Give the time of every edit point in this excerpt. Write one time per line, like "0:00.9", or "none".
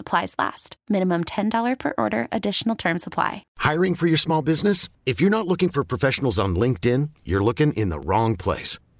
0:03.4